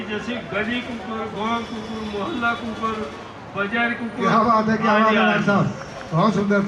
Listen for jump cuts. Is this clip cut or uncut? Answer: uncut